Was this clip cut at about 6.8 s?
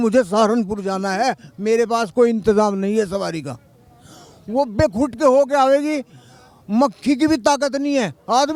no; 0 cuts

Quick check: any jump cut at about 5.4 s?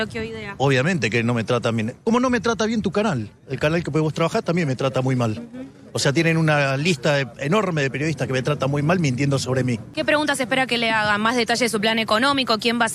no; 1 cut; at 9.9 s

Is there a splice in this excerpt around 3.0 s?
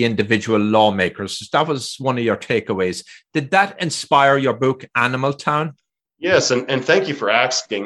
no; 0 cuts

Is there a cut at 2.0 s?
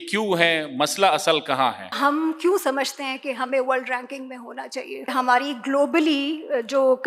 yes; 2 cuts; at 2.0 s, 5.1 s

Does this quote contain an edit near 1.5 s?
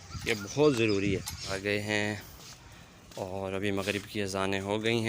yes; 1 cut; at 1.5 s

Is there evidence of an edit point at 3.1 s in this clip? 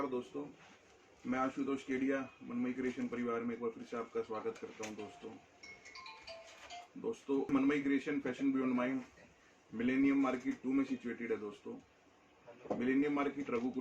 no; 1 cut; at 7.5 s

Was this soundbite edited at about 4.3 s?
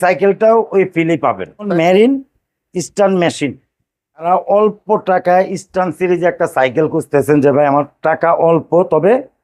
yes; 2 cuts; at 1.7 s, 4.3 s

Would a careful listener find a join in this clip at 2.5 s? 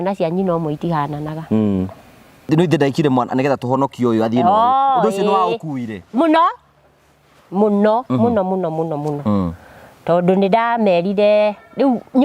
yes; 1 cut; at 2.5 s

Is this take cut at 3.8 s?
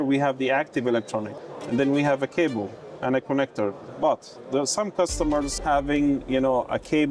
yes; 3 cuts; at 1.3 s, 3.8 s, 5.5 s

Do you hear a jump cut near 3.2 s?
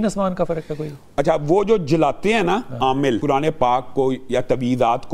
yes; 1 cut; at 3.2 s

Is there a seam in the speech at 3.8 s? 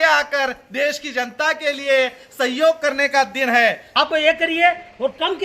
yes; 1 cut; at 3.8 s

